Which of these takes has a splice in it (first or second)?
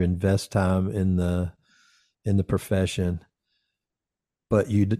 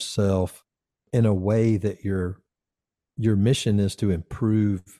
second